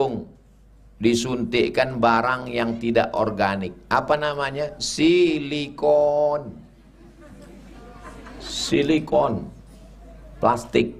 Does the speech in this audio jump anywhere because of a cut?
no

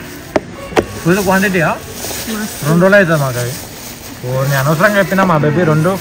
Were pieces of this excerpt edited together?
no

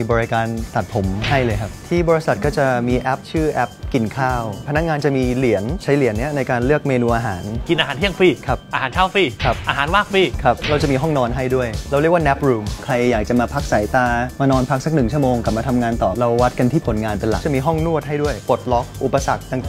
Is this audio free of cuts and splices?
no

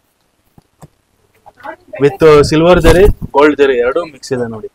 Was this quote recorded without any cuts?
yes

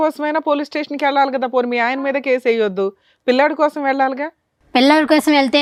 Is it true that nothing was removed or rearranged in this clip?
yes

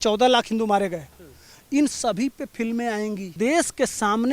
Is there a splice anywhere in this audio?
yes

